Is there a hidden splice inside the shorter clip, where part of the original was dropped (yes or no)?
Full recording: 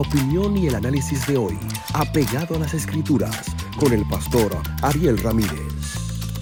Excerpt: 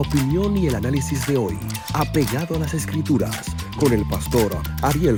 no